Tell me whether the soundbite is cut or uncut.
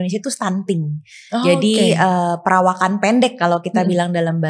uncut